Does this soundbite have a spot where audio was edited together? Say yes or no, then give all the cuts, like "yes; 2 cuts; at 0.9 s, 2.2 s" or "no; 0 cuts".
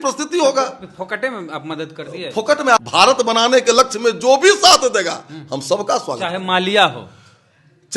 yes; 1 cut; at 2.8 s